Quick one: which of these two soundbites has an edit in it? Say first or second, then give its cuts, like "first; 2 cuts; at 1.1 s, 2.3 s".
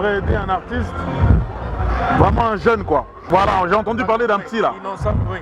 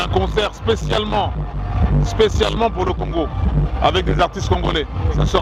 first; 1 cut; at 3.2 s